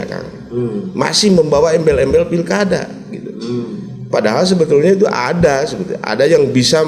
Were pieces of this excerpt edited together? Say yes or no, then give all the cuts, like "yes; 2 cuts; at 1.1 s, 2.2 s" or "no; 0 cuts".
no; 0 cuts